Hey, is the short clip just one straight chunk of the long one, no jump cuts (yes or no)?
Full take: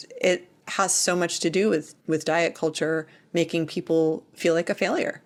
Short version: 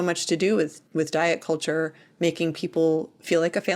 yes